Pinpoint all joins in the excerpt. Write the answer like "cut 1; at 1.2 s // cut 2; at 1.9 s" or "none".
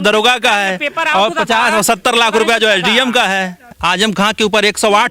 cut 1; at 3.7 s

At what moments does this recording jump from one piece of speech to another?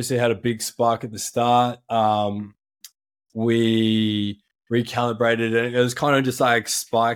none

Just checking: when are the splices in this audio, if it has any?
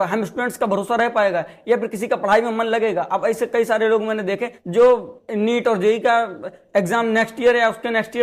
none

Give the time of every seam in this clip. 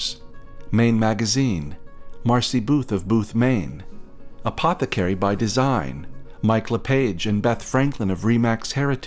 none

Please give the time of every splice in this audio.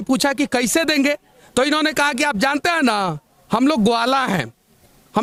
none

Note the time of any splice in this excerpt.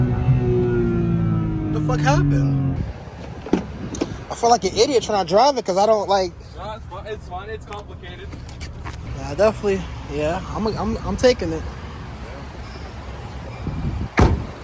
cut 1; at 2.8 s // cut 2; at 9.1 s

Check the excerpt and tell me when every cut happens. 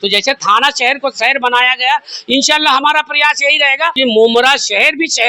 cut 1; at 3.9 s

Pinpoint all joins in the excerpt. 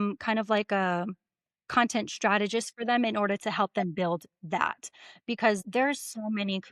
cut 1; at 5.6 s

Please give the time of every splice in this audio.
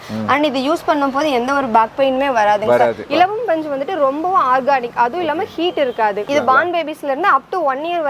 cut 1; at 3.0 s // cut 2; at 6.2 s

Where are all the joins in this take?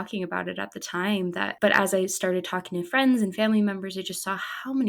cut 1; at 1.5 s

